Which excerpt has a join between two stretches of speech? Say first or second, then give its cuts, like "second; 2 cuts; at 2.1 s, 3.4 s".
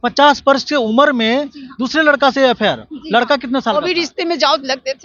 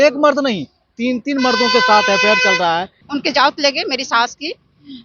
second; 1 cut; at 3.0 s